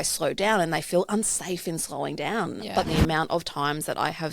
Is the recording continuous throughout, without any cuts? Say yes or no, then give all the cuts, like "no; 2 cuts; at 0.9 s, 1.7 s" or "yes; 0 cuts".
no; 1 cut; at 2.9 s